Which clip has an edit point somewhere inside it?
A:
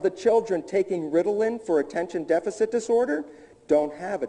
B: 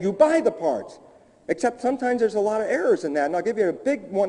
B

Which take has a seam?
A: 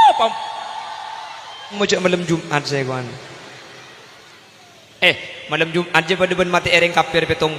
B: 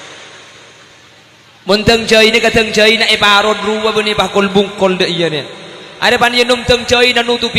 A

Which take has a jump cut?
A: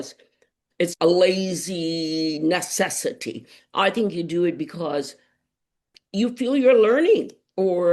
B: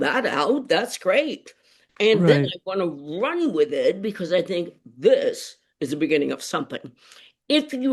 A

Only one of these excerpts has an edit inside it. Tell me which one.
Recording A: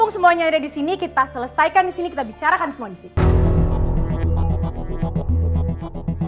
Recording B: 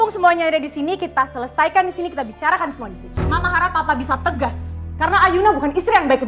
B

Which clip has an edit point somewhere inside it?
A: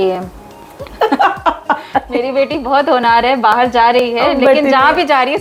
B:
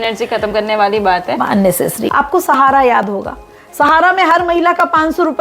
B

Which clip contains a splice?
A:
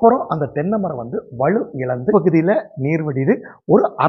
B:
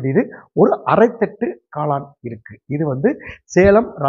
A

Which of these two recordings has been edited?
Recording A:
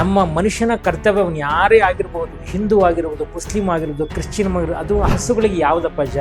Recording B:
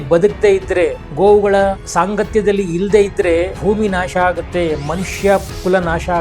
B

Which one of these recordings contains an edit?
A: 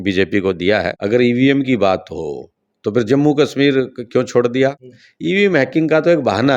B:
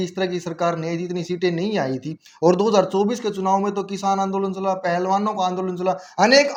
A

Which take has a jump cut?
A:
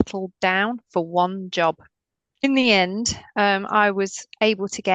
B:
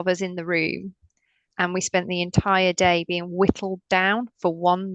A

